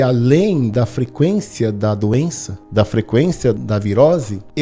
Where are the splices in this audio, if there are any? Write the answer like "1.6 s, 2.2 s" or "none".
3.6 s

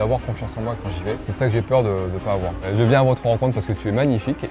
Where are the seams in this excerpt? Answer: 1.3 s, 2.7 s

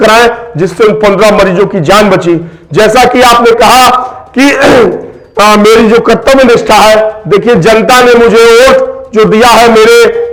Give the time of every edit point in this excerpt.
none

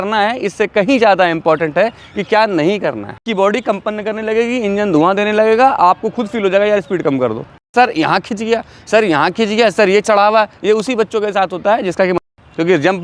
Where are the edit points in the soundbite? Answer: 3.3 s, 7.7 s, 12.2 s

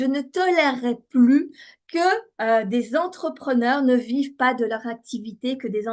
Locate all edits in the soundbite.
none

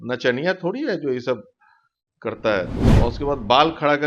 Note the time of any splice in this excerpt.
2.9 s

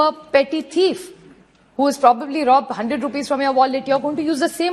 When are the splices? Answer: none

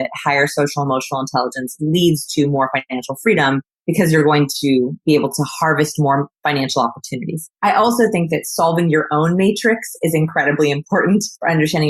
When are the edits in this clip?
3.7 s, 5.0 s

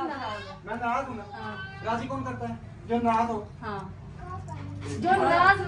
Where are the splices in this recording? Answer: none

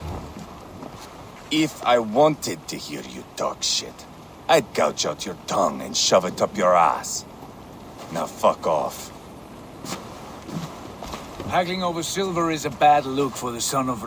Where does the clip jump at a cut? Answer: 9.5 s

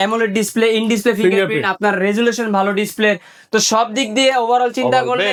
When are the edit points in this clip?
none

